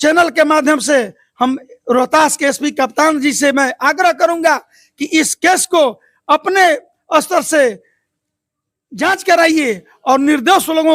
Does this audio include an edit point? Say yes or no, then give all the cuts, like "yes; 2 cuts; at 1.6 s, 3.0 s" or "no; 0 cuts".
no; 0 cuts